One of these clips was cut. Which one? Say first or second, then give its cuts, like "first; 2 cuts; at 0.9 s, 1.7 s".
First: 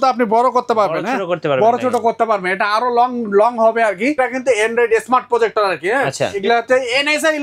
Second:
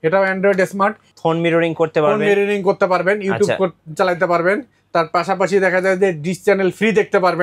first; 2 cuts; at 4.2 s, 6.4 s